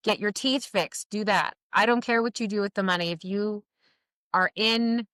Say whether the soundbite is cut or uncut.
uncut